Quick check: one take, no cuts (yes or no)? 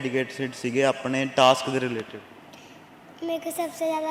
yes